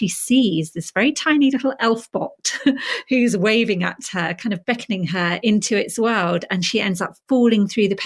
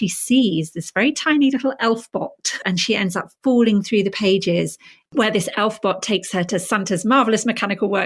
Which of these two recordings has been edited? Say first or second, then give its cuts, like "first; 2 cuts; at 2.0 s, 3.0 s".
second; 2 cuts; at 2.6 s, 5.0 s